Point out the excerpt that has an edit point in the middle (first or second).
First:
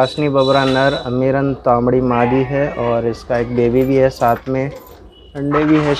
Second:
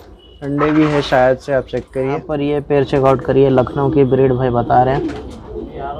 second